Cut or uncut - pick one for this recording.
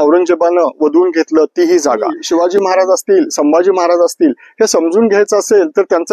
cut